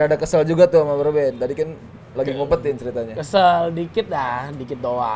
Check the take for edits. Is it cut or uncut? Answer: uncut